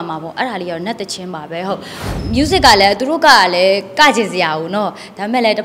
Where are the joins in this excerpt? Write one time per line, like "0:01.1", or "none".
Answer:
0:02.1